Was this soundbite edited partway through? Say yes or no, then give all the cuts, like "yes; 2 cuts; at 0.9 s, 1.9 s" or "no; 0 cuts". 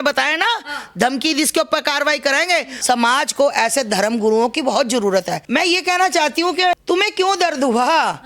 yes; 3 cuts; at 2.7 s, 5.4 s, 6.8 s